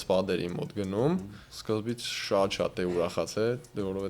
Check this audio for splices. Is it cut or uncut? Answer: cut